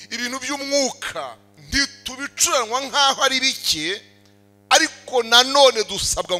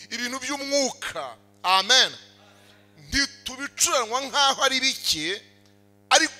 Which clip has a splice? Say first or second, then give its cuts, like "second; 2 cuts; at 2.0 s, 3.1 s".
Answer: first; 1 cut; at 1.4 s